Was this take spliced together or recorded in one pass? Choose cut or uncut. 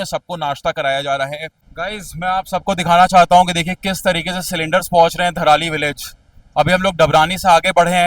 cut